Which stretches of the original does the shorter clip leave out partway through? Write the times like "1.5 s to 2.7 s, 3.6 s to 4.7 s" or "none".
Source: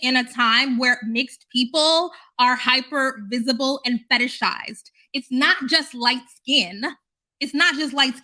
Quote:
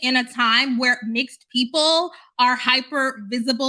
none